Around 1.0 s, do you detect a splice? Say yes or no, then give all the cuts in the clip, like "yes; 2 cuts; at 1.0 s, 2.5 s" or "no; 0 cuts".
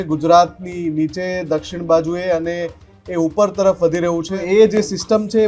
no; 1 cut; at 4.3 s